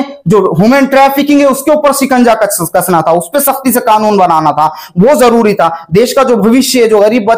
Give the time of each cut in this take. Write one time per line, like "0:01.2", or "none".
none

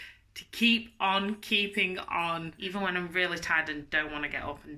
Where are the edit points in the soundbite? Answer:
0:02.6

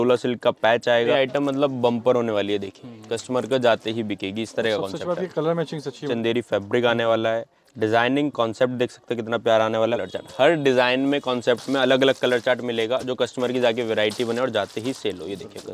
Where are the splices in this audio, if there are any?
0:01.1
0:06.1
0:10.0

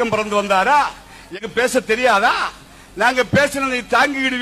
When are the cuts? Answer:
0:01.6

